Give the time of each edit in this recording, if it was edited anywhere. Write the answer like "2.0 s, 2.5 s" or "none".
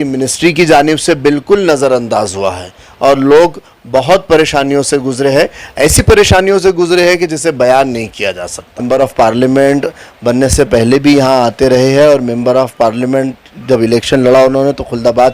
8.8 s